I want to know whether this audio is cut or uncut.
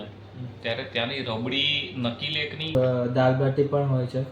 cut